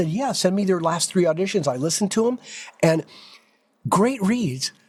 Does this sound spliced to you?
no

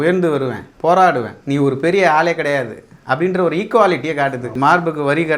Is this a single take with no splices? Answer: no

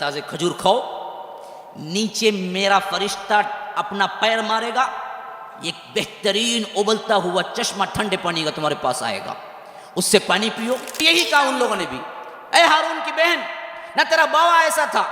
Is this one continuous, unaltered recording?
no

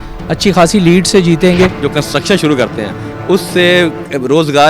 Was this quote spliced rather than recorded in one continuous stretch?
yes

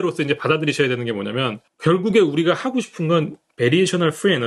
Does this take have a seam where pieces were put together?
yes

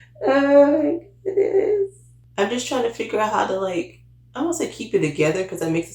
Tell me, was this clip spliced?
yes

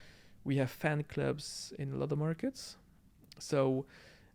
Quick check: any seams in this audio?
no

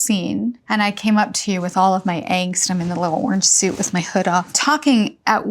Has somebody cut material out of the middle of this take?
yes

